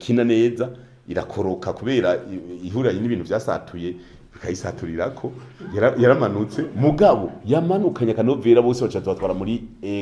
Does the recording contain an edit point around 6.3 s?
no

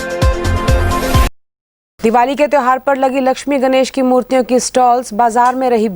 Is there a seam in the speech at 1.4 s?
yes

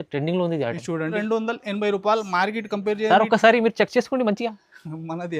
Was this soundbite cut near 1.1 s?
yes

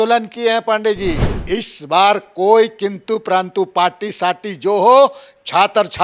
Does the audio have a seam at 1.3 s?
yes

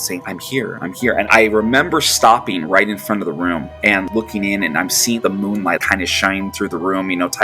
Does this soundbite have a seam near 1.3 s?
yes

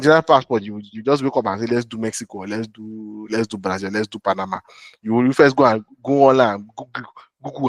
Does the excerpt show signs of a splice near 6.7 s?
no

